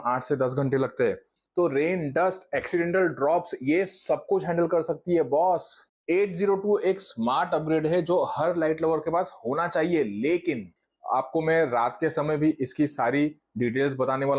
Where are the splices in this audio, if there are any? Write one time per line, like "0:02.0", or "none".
0:01.3
0:05.8
0:10.8

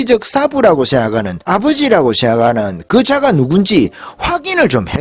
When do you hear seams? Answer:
0:01.3

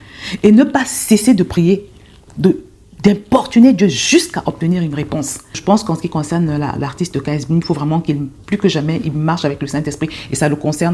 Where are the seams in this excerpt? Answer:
0:05.5

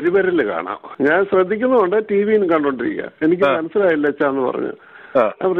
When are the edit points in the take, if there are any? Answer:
none

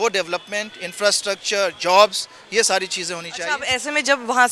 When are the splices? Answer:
none

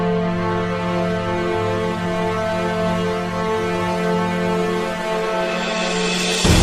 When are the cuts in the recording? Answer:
0:02.0

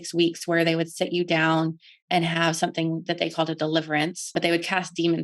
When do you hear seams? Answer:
0:04.3

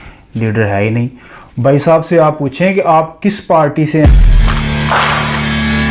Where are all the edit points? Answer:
0:04.1

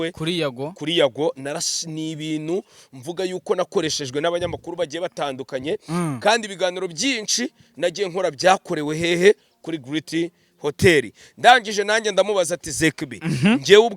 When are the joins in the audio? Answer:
none

